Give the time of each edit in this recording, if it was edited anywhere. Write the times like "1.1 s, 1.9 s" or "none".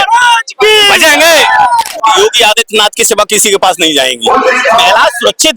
1.9 s